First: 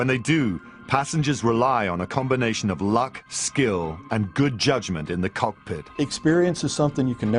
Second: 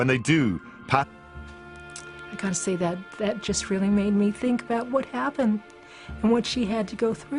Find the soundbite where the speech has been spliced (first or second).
first